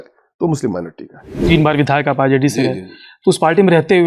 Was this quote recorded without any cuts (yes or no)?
no